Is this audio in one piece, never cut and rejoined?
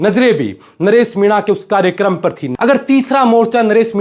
no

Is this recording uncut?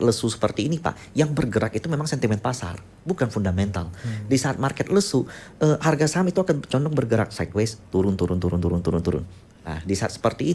yes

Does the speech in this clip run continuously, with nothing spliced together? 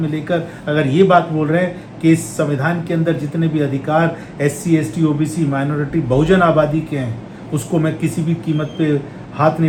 yes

